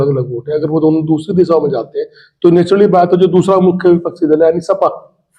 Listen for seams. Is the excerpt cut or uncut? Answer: uncut